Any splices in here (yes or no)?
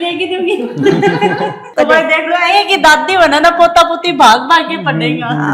no